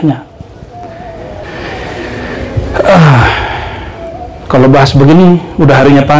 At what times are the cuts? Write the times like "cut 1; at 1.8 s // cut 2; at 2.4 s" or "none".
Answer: cut 1; at 1.4 s